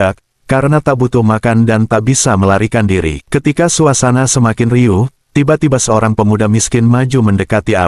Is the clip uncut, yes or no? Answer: no